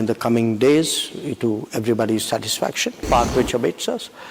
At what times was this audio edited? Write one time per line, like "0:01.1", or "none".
0:03.0

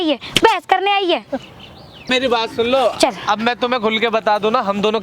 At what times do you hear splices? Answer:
0:02.1

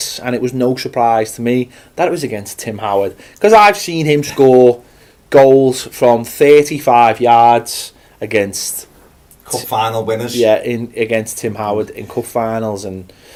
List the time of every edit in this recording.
none

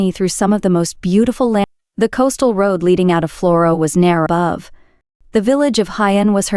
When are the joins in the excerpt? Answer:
0:01.6
0:04.3

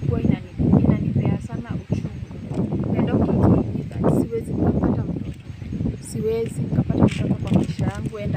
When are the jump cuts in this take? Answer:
0:02.5

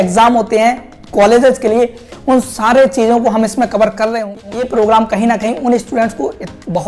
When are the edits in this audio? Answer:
0:04.2

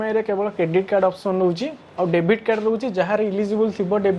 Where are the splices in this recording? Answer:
none

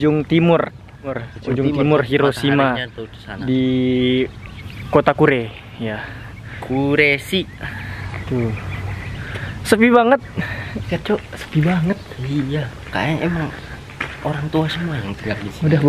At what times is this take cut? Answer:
0:01.2
0:10.9

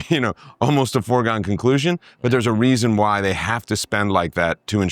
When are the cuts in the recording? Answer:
none

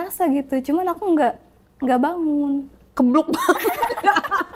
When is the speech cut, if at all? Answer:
none

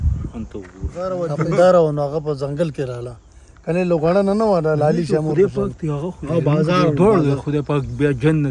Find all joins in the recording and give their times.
0:01.1

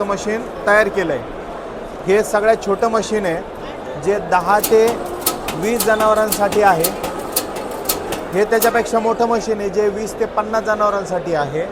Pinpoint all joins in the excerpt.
none

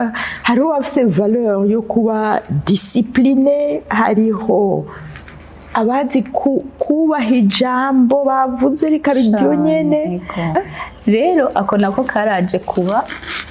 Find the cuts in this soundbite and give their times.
0:10.6

